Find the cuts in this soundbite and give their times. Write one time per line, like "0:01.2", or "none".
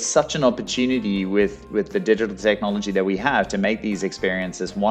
none

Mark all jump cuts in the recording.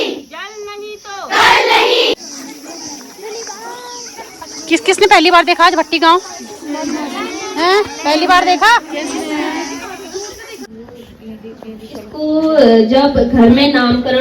0:02.1
0:10.7

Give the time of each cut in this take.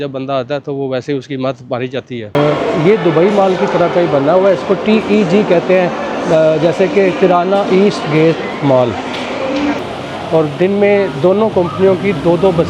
0:02.3
0:09.8

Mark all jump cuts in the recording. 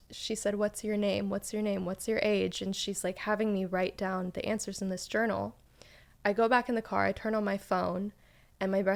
none

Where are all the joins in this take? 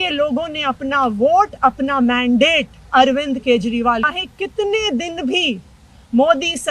0:04.1

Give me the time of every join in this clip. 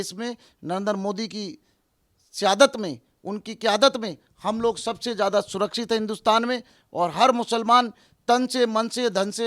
0:06.7

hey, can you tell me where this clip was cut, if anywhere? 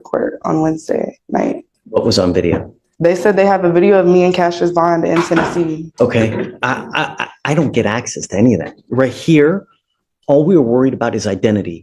0:01.7
0:05.9

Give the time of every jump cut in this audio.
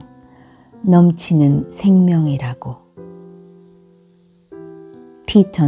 0:03.1
0:04.8

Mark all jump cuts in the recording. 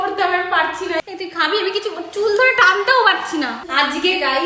0:01.0
0:03.6

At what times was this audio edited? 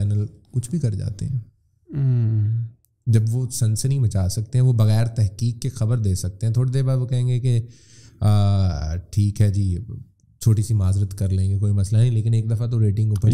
none

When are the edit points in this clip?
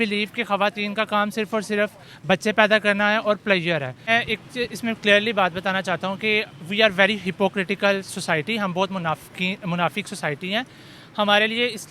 0:04.1

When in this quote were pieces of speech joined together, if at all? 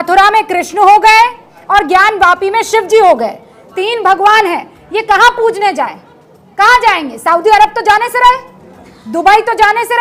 none

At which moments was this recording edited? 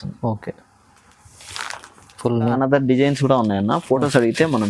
0:02.5

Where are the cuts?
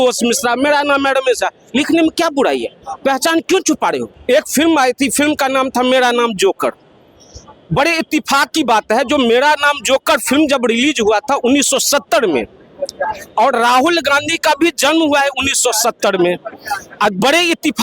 0:04.1

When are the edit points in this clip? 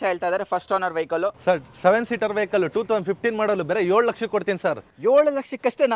0:01.4

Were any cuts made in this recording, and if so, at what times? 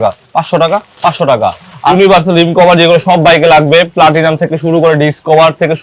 0:01.9

